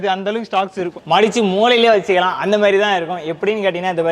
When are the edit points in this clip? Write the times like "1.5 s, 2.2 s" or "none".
0.9 s

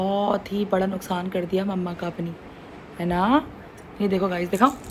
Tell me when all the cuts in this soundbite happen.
none

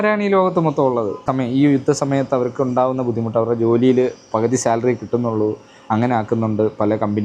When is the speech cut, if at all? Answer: 1.2 s

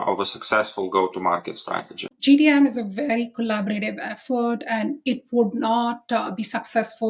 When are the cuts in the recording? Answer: 2.1 s

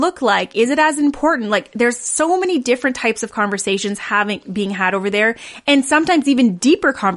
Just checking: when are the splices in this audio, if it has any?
none

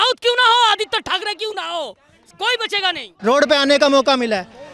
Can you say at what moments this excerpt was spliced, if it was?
3.1 s

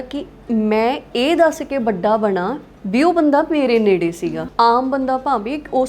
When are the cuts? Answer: 4.3 s

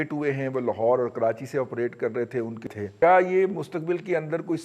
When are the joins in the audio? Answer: 2.6 s

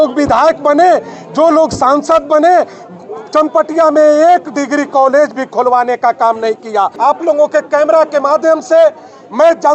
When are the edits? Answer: 6.9 s

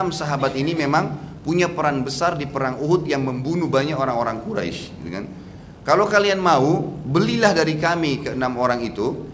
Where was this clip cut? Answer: none

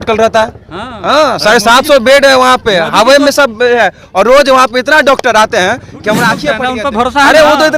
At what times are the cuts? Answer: 6.6 s

